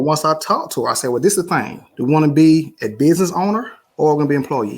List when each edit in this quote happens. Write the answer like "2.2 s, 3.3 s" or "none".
1.8 s, 3.8 s